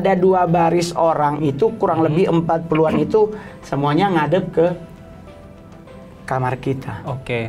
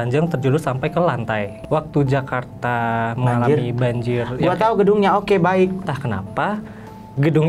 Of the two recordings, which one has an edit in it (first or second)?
second